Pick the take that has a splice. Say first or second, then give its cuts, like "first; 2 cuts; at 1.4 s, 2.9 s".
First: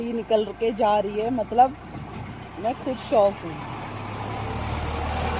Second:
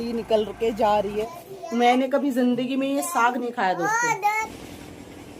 second; 2 cuts; at 1.5 s, 4.6 s